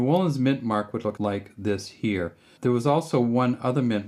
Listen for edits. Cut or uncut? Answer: cut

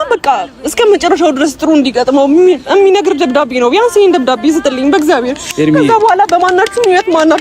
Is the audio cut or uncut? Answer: uncut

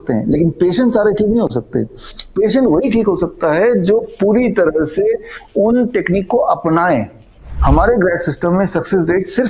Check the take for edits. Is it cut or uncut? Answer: cut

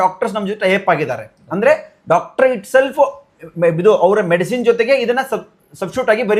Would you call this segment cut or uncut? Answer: uncut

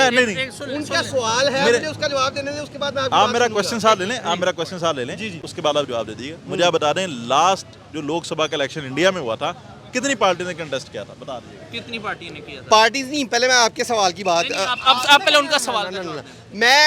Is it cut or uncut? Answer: uncut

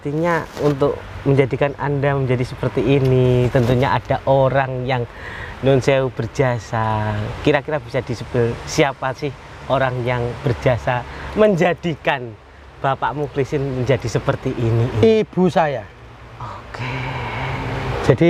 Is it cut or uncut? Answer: uncut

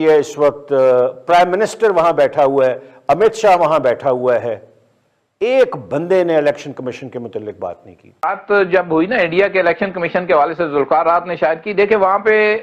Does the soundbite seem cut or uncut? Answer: cut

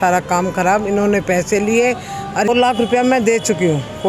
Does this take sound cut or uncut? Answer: cut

